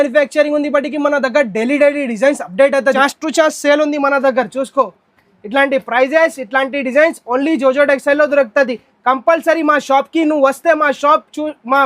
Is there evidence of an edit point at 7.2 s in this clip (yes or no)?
no